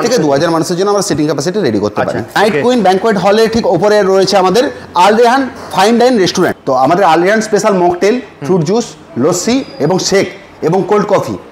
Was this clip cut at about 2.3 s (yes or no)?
yes